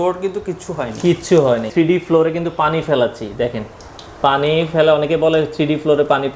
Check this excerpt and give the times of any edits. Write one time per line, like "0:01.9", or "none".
0:01.7